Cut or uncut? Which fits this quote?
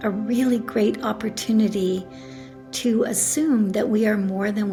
uncut